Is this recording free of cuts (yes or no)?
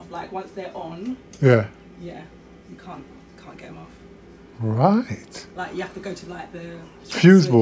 yes